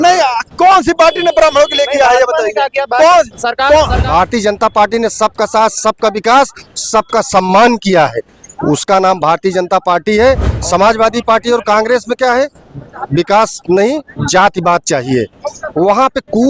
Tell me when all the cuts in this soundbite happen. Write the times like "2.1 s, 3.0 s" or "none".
4.0 s, 10.5 s